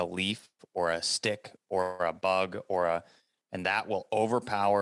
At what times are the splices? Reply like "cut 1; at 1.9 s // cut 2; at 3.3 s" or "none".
none

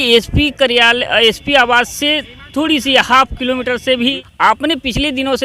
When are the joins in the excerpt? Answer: cut 1; at 4.2 s

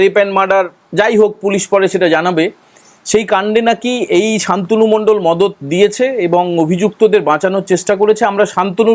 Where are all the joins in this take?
none

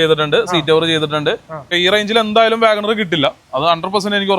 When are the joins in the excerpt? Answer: cut 1; at 1.7 s

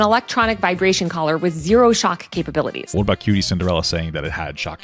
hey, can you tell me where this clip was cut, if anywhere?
cut 1; at 2.8 s

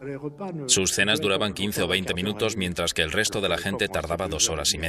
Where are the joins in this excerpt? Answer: none

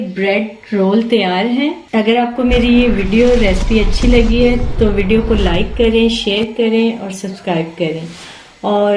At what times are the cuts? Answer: cut 1; at 1.8 s

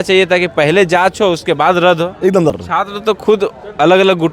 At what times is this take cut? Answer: cut 1; at 2.5 s

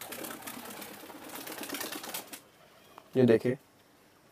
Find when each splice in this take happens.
none

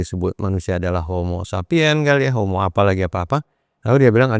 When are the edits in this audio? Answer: none

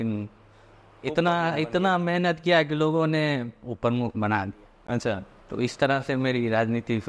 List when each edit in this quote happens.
none

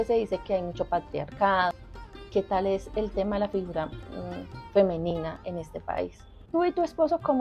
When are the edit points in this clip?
cut 1; at 1.8 s // cut 2; at 6.4 s

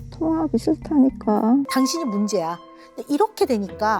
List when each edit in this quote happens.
cut 1; at 1.7 s

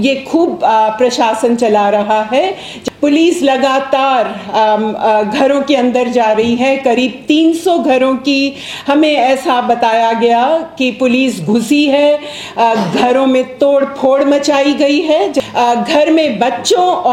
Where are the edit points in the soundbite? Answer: cut 1; at 2.7 s // cut 2; at 15.4 s

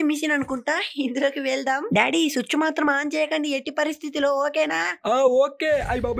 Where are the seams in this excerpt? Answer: none

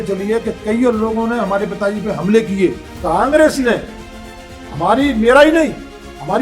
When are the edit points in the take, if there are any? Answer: cut 1; at 2.9 s

